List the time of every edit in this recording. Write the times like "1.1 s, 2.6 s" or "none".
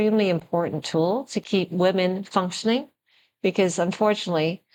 none